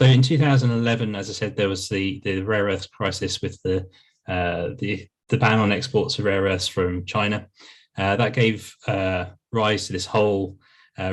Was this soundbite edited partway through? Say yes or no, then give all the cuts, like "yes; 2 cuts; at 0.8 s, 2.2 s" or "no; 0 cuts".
no; 0 cuts